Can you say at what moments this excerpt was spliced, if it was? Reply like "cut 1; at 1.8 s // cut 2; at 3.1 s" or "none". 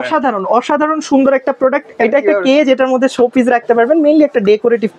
cut 1; at 2.0 s